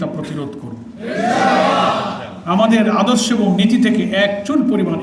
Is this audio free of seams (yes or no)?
yes